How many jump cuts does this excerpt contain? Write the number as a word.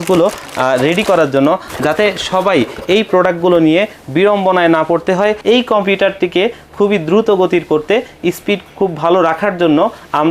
one